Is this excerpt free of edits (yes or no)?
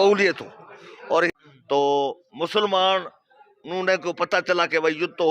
no